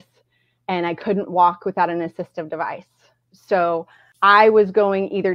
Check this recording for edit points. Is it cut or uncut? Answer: cut